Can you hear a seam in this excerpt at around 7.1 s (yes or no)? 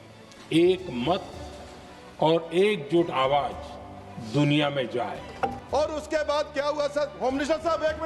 no